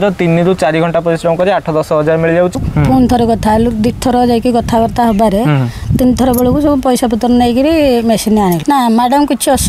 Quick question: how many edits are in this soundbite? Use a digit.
2